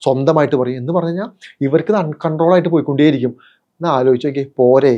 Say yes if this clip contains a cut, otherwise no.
no